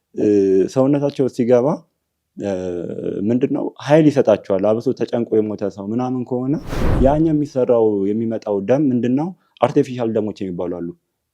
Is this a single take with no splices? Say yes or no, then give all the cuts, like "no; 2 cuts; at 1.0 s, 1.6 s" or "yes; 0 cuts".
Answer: no; 1 cut; at 6.8 s